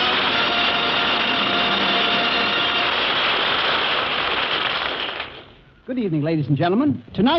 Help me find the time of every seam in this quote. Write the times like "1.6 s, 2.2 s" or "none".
5.9 s